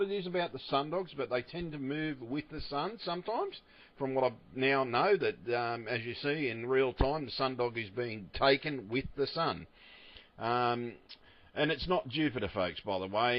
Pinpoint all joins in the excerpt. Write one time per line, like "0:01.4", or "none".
0:04.1